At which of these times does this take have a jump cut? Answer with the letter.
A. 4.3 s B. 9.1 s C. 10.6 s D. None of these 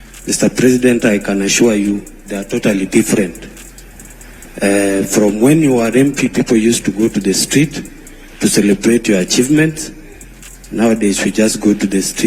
B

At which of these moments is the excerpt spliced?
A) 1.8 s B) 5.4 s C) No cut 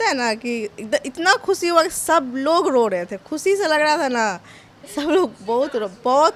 C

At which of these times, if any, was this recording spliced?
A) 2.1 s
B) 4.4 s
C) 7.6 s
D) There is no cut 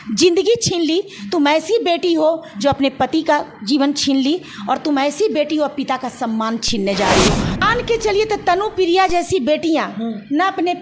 C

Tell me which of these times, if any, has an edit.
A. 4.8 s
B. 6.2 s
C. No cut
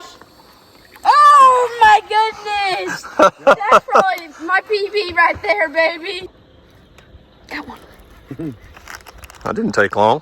B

